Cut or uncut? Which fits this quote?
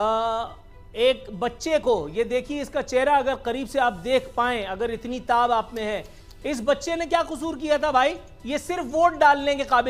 uncut